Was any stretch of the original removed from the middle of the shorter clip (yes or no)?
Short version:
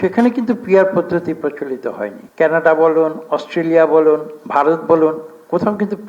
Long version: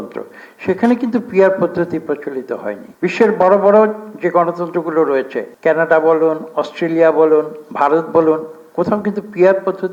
yes